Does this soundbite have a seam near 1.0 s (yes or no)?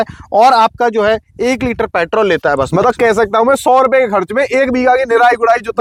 no